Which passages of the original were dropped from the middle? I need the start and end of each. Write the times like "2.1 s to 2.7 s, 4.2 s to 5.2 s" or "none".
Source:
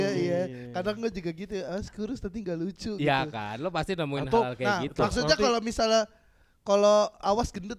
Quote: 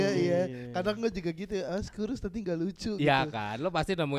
none